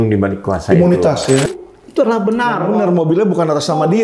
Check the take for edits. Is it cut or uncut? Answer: cut